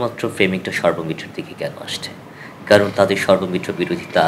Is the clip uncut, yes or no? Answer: yes